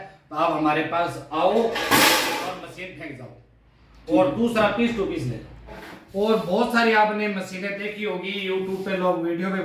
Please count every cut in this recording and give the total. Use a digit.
1